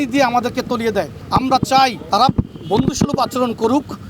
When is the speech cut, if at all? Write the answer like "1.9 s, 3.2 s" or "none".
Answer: none